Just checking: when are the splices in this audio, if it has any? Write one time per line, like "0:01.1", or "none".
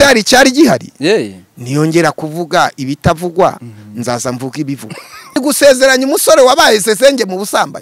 0:05.4